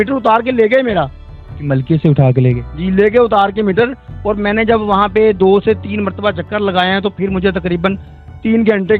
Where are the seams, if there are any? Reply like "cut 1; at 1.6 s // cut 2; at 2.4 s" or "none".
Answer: none